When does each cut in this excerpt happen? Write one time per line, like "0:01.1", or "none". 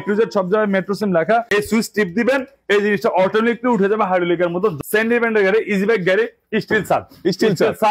0:01.5
0:04.8